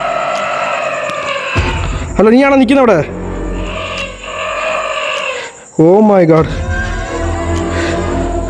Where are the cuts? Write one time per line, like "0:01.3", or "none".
0:06.5